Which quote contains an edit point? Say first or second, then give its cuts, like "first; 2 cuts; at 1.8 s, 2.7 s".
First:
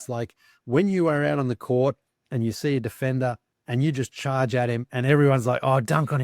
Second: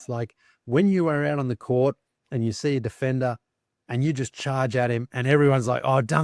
first; 1 cut; at 3.5 s